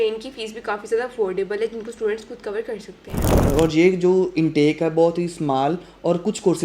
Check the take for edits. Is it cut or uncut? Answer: cut